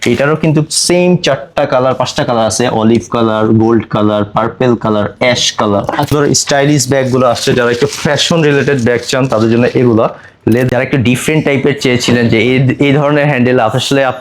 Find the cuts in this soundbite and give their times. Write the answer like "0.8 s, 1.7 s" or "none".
6.1 s, 10.7 s